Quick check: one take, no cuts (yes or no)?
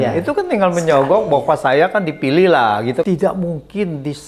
no